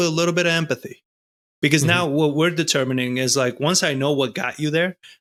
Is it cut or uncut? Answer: uncut